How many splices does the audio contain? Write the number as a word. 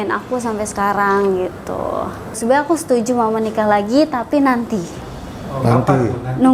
one